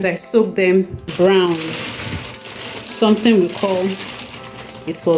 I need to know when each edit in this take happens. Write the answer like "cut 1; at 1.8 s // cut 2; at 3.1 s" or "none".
cut 1; at 1.1 s

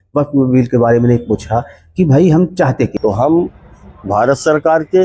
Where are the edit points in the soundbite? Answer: cut 1; at 2.9 s

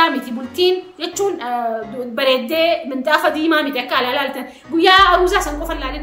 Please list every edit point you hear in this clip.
none

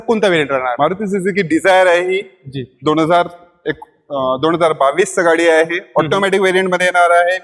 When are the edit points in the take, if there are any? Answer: none

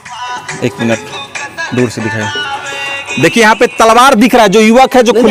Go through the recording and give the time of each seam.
none

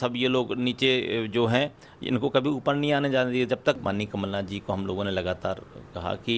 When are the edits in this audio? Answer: cut 1; at 3.8 s

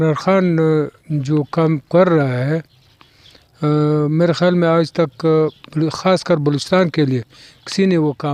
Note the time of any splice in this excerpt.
none

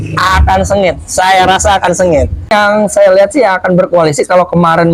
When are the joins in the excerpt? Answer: cut 1; at 2.5 s

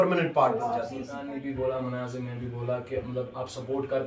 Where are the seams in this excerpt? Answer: cut 1; at 1.0 s

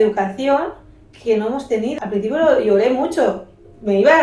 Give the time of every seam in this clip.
cut 1; at 1.9 s

